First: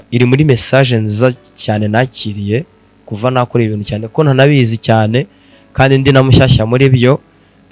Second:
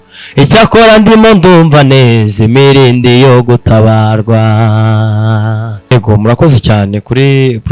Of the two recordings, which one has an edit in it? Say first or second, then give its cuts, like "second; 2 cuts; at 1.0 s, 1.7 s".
second; 1 cut; at 5.9 s